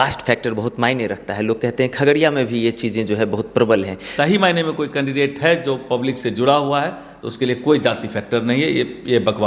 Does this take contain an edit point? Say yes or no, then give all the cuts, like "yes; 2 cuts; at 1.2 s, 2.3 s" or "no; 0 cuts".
yes; 1 cut; at 4.0 s